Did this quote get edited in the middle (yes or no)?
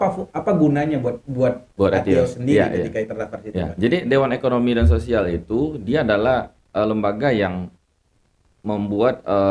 no